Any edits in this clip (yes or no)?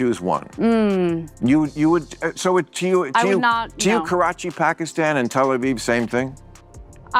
no